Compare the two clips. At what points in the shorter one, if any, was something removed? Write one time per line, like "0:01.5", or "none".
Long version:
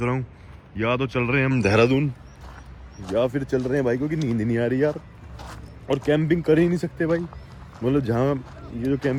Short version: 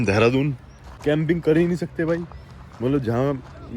0:01.0